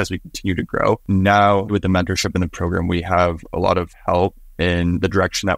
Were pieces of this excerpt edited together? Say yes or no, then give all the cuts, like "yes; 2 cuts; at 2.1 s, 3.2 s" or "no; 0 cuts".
yes; 2 cuts; at 1.0 s, 1.7 s